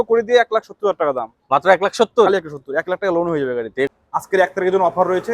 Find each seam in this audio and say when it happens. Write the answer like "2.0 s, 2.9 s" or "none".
4.0 s